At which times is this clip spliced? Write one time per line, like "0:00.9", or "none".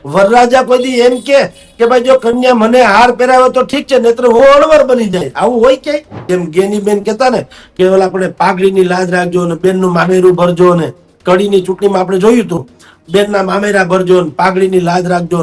0:06.2